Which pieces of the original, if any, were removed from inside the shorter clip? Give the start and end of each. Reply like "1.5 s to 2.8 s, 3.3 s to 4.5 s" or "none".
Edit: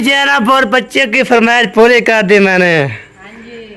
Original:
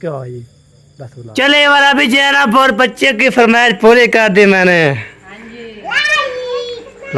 none

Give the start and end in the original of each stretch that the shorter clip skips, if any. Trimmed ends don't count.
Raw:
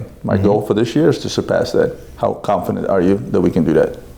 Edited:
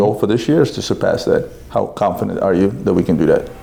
none

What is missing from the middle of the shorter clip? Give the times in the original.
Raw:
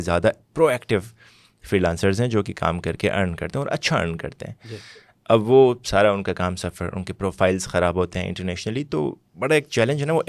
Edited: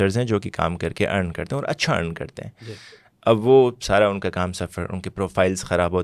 none

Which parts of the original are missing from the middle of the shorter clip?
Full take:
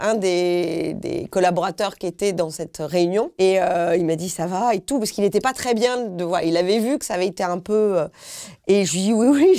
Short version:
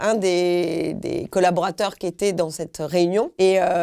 none

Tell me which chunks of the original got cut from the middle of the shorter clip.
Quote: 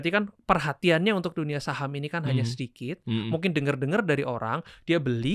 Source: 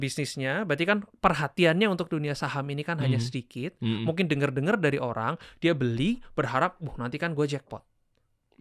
none

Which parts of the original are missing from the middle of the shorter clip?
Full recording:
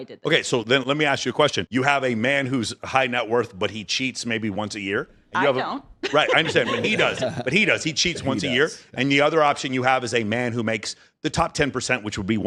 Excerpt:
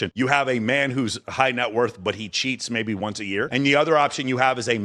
5.0 s to 8.9 s

